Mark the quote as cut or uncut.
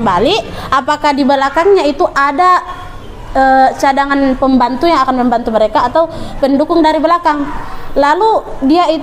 uncut